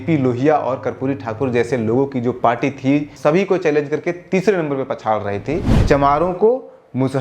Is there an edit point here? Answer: yes; 2 cuts; at 3.1 s, 5.7 s

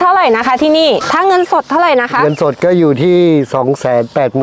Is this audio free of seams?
no; 1 cut; at 1.0 s

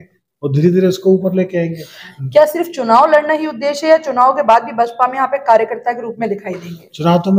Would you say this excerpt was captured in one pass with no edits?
no; 1 cut; at 2.0 s

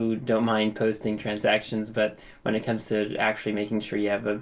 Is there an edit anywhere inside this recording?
no; 0 cuts

